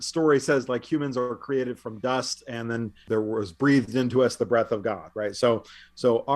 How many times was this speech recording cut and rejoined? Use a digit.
1